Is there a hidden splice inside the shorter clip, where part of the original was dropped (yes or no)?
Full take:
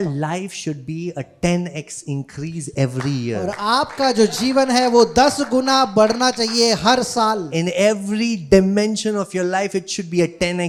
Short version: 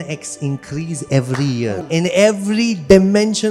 yes